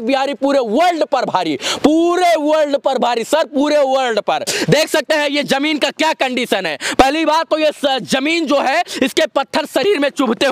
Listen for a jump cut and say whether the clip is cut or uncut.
uncut